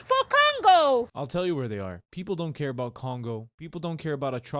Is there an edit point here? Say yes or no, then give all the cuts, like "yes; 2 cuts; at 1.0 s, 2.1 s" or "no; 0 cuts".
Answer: yes; 3 cuts; at 1.2 s, 2.1 s, 3.7 s